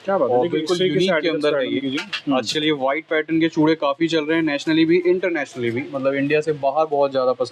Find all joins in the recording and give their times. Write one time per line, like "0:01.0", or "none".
none

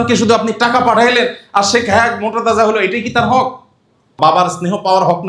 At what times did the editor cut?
none

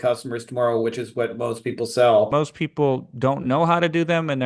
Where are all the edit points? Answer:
0:02.3

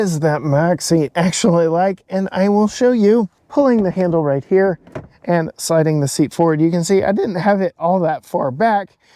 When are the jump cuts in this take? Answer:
0:03.4

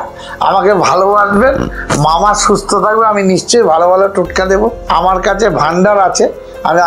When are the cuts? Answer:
0:04.8

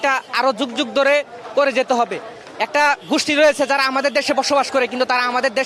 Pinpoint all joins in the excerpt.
none

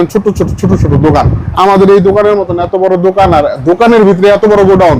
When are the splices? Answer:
0:01.4

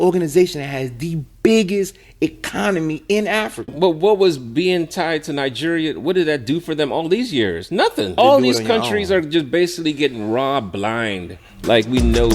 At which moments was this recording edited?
0:03.7
0:08.2

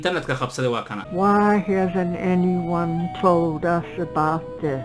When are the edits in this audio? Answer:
0:01.0

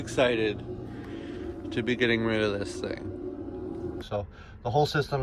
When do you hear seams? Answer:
0:04.0

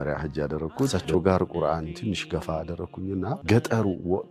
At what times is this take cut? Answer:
0:00.9
0:03.4

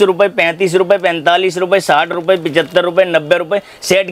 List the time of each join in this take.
none

